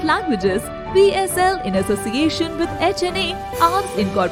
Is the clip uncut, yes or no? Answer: yes